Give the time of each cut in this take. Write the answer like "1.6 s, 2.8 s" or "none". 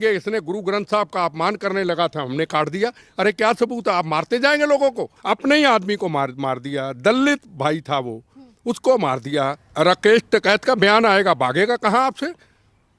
5.1 s, 9.6 s

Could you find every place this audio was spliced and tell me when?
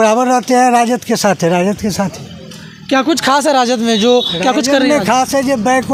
none

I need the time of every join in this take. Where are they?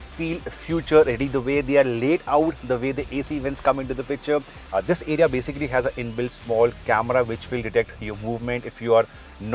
4.6 s

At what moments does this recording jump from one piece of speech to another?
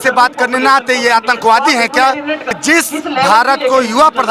2.5 s

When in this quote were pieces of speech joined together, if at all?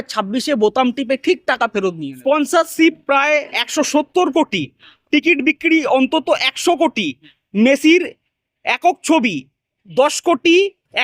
2.1 s

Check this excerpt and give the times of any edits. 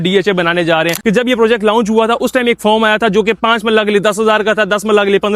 0.9 s

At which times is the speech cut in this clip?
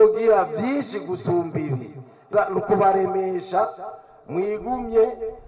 2.2 s

